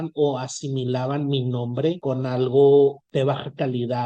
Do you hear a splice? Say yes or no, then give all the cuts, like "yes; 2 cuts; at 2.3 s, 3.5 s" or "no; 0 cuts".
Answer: yes; 2 cuts; at 2.0 s, 3.0 s